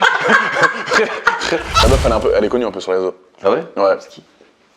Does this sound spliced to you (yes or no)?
yes